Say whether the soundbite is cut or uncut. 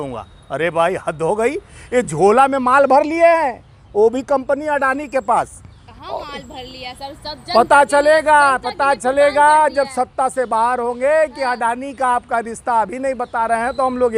uncut